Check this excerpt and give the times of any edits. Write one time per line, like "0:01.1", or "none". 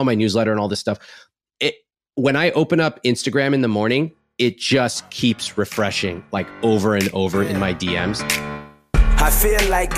0:08.2